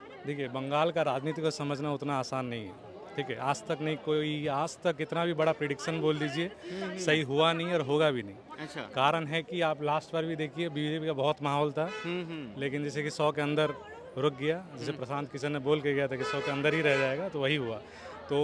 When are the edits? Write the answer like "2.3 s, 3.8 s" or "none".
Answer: none

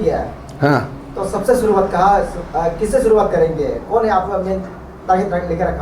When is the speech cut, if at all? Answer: none

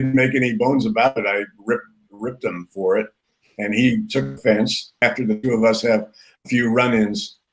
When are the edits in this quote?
4.9 s

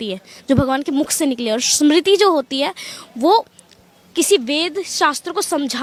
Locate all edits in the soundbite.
none

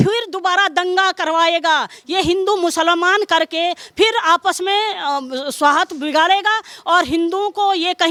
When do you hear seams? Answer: none

